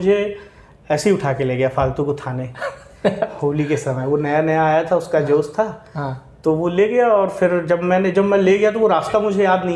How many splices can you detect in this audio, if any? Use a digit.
0